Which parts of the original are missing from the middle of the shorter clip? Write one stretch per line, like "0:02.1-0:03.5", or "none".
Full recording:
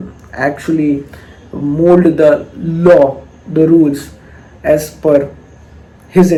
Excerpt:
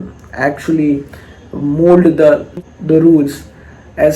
0:02.6-0:03.3

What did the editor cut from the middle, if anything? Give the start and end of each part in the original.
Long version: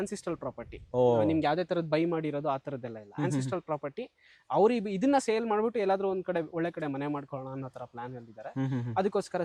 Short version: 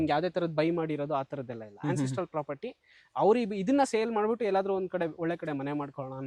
none

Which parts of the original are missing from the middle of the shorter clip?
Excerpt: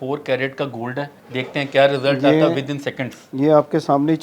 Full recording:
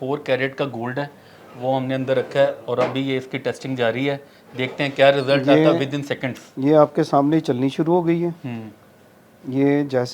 0:01.2-0:04.4

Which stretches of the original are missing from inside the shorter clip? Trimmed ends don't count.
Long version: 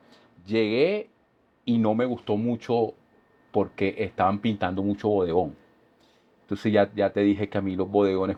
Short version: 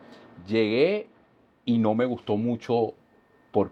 none

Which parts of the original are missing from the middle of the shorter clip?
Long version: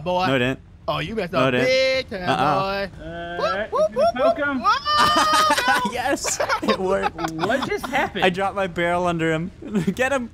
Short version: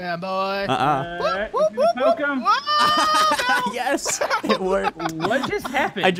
none

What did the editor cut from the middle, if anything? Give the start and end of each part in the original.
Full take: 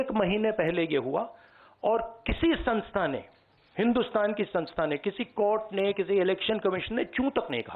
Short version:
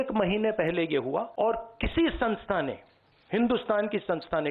0:01.3-0:01.8

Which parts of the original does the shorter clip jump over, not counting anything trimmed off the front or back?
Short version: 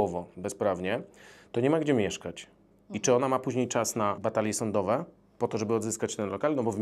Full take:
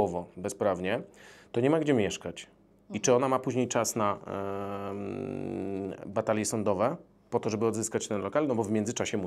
0:04.2-0:06.1

